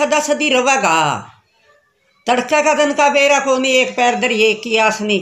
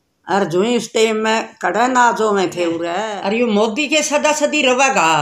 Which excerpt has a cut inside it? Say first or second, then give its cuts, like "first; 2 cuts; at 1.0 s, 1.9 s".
second; 1 cut; at 3.1 s